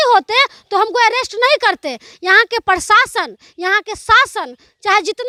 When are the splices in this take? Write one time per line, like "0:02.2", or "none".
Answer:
none